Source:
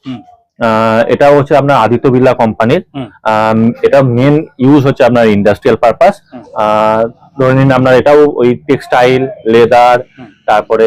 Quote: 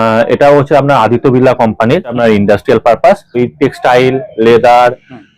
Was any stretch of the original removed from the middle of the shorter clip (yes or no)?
yes